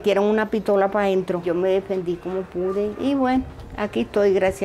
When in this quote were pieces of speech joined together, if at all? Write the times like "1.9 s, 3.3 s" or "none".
1.4 s

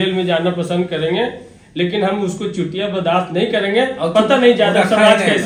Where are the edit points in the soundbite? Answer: none

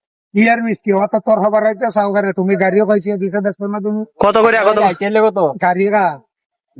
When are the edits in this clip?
none

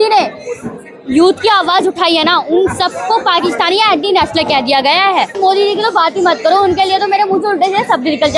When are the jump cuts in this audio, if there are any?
5.4 s

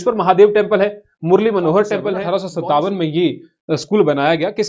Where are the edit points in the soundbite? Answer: 2.2 s

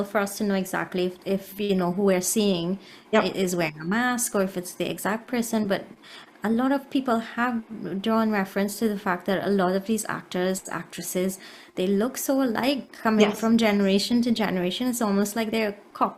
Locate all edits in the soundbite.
none

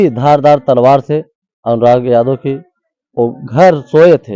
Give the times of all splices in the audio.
none

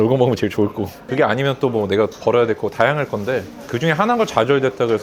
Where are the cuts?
1.1 s, 3.6 s

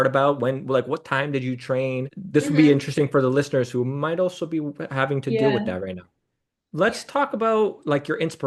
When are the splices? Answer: 6.7 s

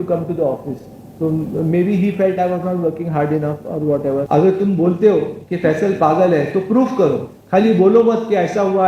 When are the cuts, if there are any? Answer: 4.2 s

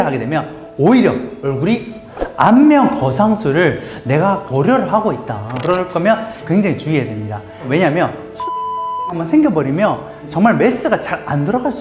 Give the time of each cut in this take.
2.0 s

